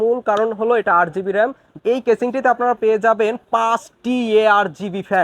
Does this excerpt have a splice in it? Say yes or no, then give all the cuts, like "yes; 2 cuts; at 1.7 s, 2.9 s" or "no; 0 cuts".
yes; 1 cut; at 1.7 s